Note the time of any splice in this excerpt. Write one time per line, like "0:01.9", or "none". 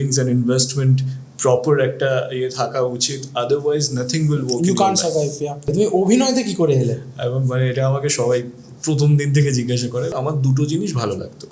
0:05.7
0:10.1

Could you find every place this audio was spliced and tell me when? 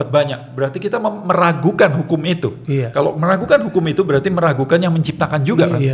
none

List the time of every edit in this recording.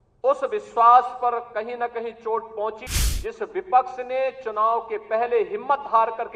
0:02.8

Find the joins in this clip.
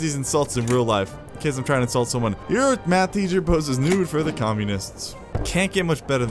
0:02.4
0:05.4

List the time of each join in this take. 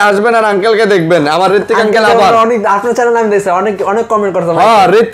none

